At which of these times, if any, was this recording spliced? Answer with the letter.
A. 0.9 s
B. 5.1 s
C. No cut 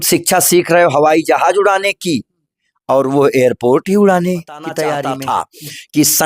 B